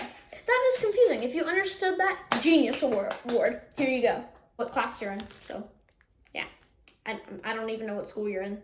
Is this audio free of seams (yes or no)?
no